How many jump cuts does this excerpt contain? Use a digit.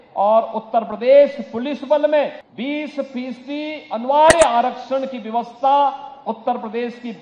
1